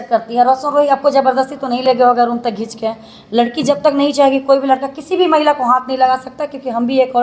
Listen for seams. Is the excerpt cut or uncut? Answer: uncut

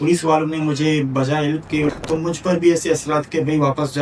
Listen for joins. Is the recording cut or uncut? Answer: cut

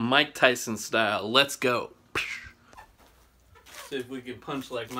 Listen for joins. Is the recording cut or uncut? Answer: cut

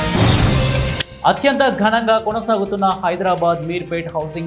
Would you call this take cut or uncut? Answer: cut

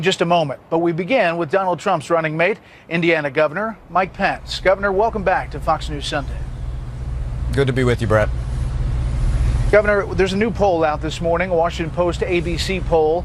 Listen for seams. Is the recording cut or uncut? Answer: cut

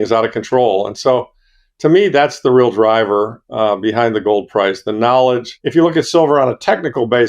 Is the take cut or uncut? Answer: cut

